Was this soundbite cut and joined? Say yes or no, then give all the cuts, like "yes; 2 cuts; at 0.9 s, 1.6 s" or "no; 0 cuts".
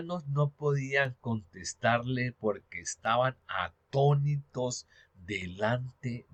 no; 0 cuts